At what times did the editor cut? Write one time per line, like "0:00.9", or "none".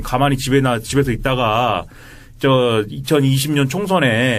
none